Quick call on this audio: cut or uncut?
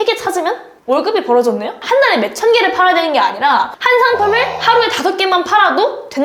uncut